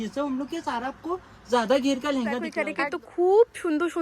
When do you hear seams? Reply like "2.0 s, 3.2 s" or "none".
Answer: 2.6 s